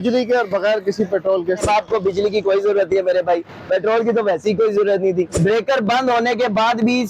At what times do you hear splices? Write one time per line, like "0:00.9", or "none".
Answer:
0:01.6
0:05.3